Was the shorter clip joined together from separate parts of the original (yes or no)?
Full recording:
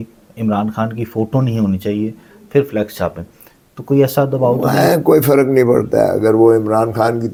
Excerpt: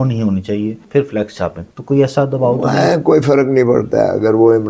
yes